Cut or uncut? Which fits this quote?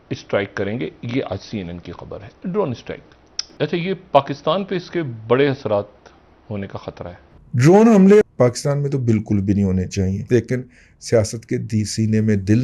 cut